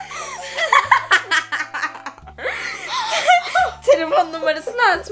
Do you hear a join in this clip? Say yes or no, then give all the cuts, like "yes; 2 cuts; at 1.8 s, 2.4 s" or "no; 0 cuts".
no; 0 cuts